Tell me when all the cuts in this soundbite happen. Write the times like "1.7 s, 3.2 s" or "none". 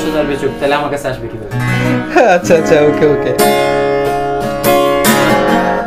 none